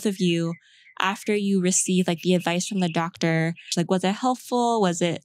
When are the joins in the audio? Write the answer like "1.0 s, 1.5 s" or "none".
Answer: 3.7 s